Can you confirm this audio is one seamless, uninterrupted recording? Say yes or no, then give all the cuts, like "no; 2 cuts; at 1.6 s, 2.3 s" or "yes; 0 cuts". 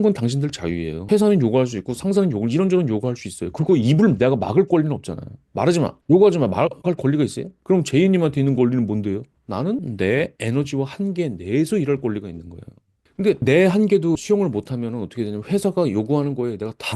no; 4 cuts; at 0.9 s, 7.5 s, 9.9 s, 13.2 s